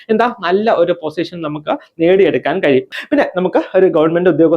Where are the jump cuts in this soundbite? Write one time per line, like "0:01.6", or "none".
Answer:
0:02.9